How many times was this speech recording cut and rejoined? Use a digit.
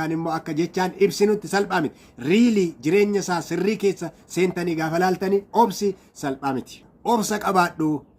1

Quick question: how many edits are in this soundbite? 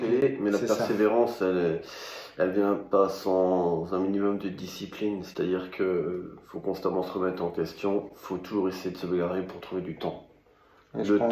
0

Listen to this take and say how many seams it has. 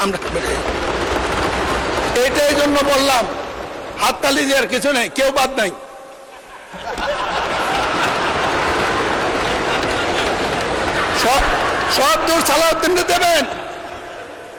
0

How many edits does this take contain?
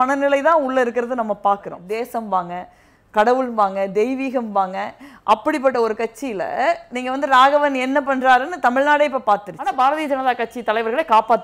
2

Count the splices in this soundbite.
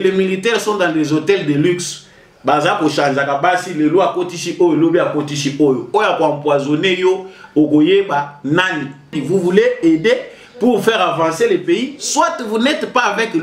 1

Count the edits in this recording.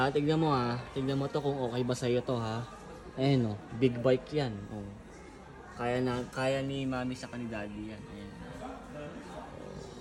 0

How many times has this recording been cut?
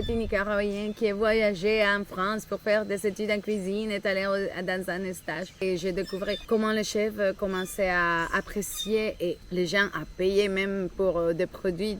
2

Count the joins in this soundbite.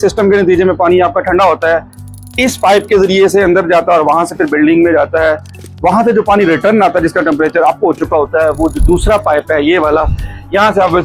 0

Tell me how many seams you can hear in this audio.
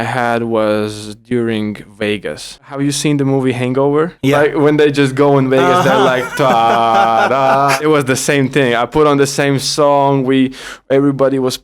2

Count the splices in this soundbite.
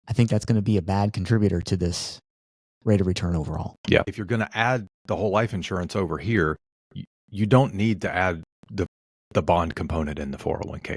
1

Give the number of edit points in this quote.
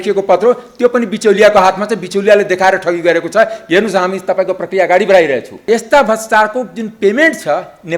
1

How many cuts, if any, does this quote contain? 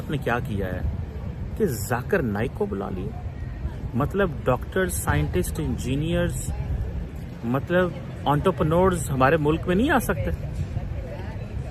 0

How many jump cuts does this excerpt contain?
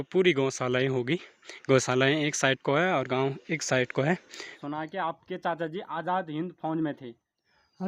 1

